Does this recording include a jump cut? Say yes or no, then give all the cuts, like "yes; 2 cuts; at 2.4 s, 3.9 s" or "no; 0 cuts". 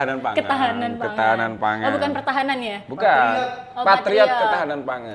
no; 0 cuts